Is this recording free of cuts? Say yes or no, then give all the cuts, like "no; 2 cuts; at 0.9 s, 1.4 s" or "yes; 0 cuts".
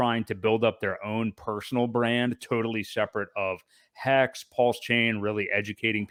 yes; 0 cuts